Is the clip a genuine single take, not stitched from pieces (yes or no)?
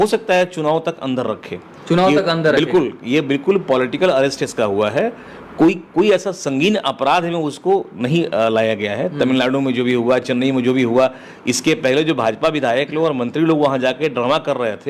yes